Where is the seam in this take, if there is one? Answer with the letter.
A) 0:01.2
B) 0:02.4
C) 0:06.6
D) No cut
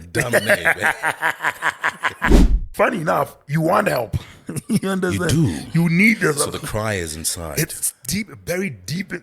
B